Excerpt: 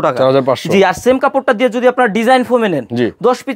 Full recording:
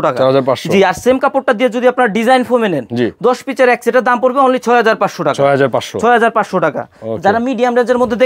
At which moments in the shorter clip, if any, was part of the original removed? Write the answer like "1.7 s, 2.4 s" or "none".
none